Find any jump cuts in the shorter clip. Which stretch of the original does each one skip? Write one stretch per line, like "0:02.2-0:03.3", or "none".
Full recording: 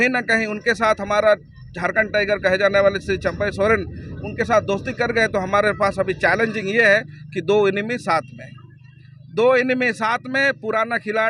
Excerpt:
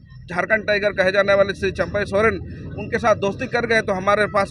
none